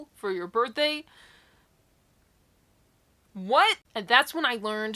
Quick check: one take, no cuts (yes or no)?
no